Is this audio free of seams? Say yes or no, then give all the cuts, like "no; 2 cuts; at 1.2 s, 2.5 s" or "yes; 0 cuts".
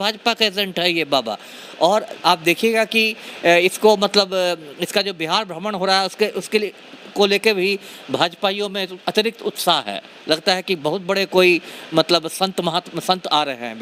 yes; 0 cuts